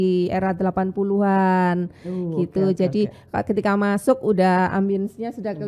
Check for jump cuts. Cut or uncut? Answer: uncut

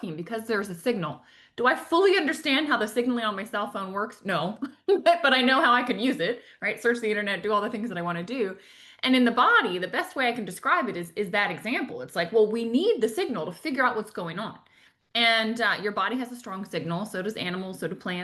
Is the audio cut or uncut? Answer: uncut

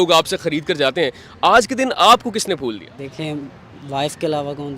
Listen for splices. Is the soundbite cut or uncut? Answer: cut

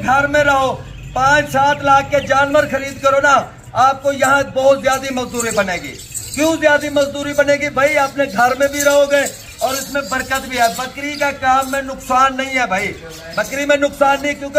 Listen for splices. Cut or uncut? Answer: uncut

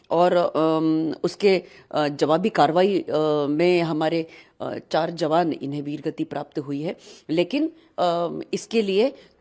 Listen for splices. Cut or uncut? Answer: uncut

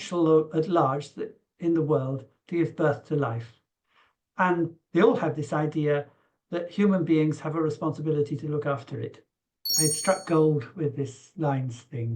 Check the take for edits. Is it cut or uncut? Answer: cut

